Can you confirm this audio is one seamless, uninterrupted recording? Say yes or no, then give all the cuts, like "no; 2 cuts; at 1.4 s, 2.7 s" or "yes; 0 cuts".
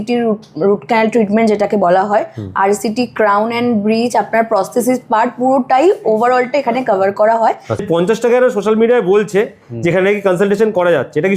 no; 1 cut; at 7.8 s